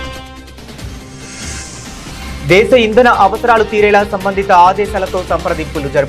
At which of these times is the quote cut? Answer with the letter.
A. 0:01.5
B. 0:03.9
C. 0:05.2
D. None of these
A